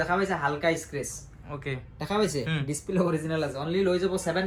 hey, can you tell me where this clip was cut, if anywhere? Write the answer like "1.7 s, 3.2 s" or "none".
none